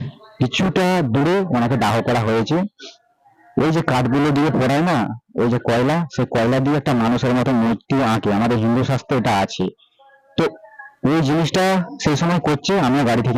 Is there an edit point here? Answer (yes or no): no